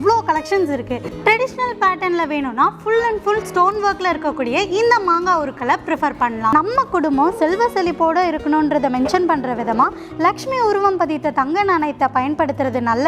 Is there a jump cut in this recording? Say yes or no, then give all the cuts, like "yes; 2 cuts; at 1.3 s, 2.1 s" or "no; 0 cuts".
yes; 2 cuts; at 1.1 s, 6.5 s